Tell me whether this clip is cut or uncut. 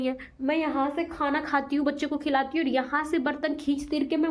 uncut